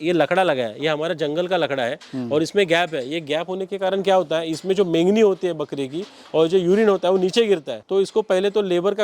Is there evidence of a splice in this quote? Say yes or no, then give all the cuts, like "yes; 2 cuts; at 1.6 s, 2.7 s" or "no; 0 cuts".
no; 0 cuts